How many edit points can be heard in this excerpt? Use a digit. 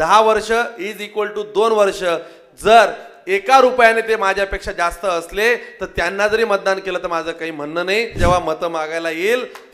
1